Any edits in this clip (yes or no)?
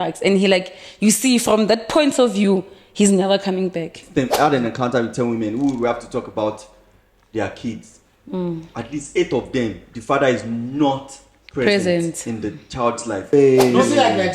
yes